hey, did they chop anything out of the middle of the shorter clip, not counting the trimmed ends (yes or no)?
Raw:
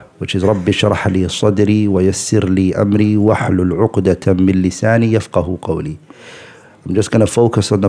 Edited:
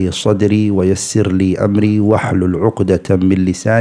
no